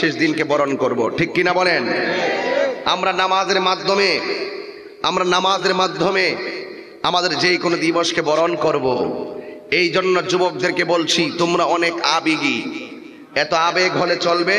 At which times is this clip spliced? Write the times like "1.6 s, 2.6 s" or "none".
none